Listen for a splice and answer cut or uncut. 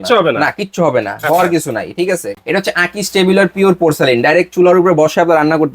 cut